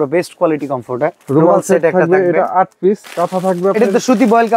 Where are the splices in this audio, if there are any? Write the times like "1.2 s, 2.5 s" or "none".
1.2 s, 3.1 s